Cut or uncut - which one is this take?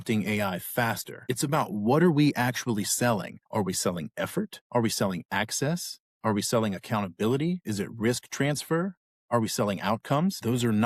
uncut